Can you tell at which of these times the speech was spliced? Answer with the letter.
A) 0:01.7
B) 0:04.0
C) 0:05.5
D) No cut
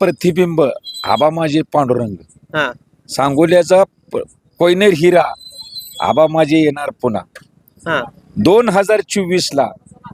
D